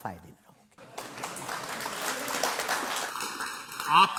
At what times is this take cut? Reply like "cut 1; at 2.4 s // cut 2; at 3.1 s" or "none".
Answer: none